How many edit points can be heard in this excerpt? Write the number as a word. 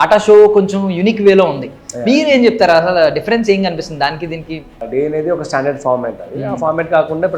one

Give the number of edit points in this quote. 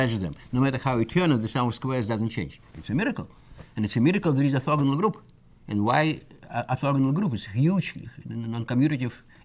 zero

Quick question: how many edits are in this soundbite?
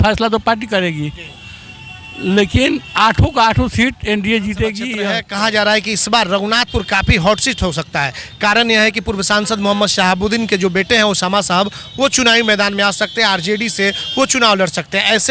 one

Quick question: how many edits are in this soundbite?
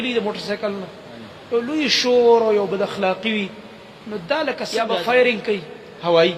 one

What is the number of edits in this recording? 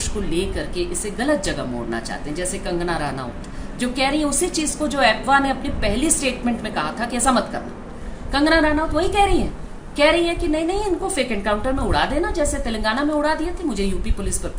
zero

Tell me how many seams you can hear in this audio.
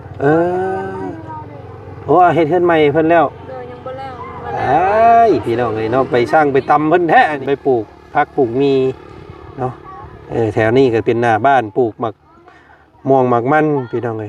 one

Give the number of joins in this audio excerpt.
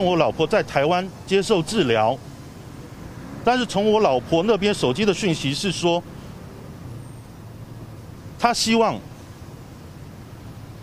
zero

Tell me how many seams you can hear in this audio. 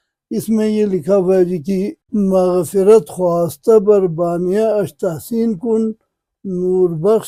zero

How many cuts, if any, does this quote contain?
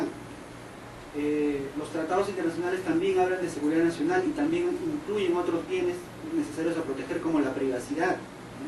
one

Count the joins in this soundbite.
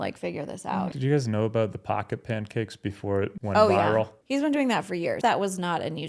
four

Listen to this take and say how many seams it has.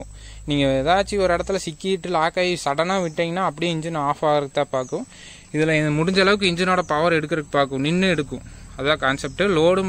zero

